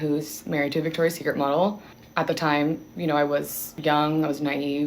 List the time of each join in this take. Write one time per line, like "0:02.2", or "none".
0:03.6